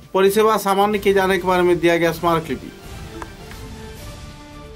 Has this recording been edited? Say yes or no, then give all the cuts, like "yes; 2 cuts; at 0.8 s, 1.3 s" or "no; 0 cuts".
no; 0 cuts